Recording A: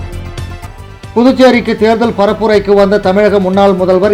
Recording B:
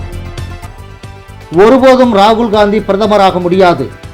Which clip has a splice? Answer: B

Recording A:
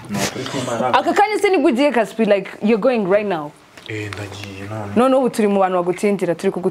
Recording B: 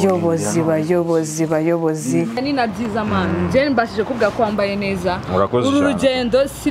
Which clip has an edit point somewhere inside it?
B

